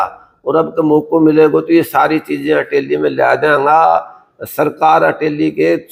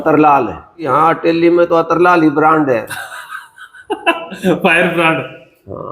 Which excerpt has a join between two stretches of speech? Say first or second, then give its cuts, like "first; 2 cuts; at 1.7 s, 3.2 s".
second; 1 cut; at 0.9 s